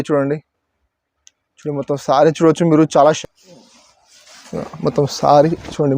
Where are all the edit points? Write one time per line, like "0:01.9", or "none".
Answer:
0:03.2